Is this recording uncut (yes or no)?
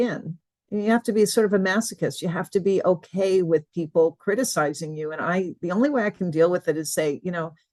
yes